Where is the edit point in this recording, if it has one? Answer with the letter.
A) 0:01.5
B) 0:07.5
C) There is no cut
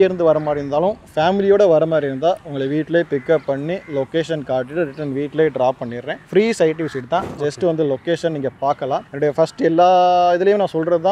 C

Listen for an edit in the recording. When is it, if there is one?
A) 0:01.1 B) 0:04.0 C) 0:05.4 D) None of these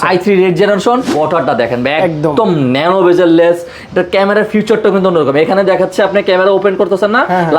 A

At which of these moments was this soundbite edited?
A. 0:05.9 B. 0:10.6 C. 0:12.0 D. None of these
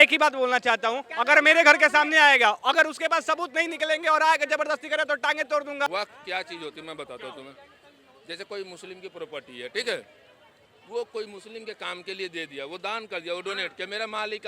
A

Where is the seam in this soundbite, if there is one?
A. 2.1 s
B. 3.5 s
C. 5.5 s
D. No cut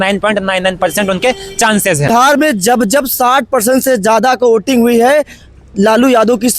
A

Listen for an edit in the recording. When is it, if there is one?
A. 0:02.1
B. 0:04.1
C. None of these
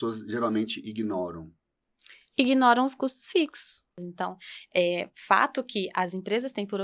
B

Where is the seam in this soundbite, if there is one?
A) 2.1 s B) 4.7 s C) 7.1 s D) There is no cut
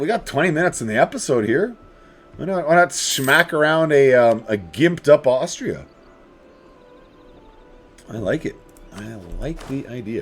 D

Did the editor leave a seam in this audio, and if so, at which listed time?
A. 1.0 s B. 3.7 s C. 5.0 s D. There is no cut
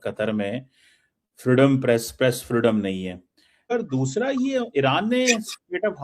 B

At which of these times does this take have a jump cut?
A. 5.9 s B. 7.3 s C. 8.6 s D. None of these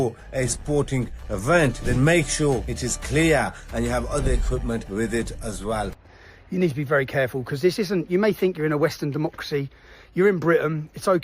A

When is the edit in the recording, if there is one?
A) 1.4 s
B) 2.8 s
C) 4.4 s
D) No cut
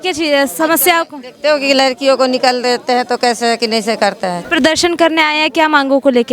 C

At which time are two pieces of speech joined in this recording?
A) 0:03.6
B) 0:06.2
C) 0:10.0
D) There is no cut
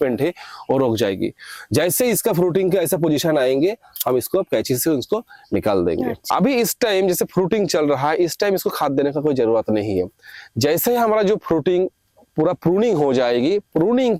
B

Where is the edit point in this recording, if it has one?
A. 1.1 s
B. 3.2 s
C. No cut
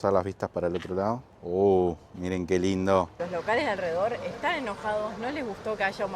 B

